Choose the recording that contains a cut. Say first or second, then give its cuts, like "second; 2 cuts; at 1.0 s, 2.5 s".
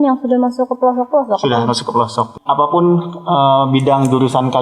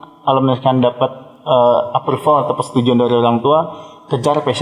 first; 1 cut; at 2.4 s